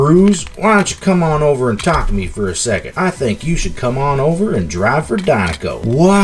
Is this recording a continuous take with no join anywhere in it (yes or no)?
no